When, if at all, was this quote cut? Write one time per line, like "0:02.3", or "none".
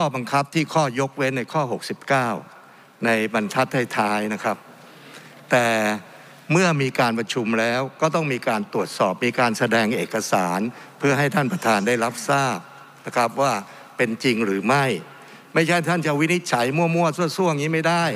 none